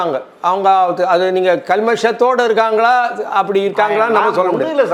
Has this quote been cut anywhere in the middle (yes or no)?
no